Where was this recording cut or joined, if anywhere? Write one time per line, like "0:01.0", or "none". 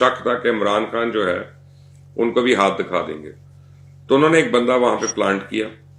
none